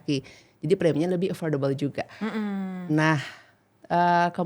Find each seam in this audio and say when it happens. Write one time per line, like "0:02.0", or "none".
none